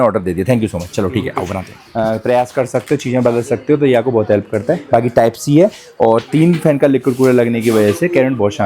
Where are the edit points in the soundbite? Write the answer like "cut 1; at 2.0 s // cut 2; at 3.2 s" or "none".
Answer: cut 1; at 1.8 s